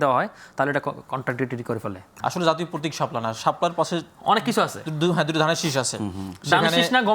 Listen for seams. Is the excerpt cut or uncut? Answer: cut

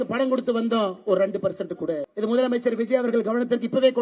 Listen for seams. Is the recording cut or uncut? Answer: cut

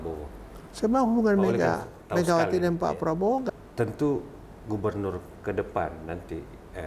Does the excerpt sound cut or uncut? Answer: cut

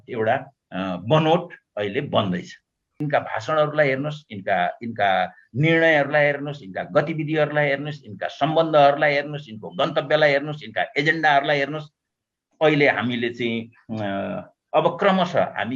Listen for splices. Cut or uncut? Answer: cut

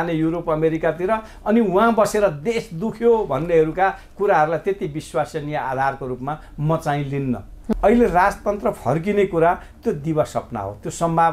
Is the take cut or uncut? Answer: cut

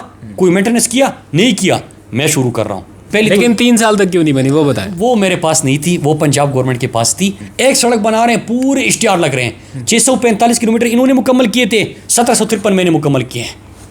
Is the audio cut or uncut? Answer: cut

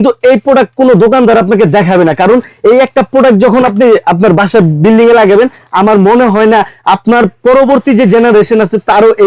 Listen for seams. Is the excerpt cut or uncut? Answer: uncut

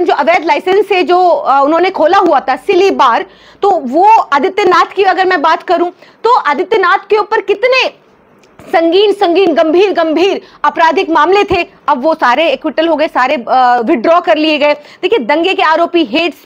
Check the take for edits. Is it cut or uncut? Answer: uncut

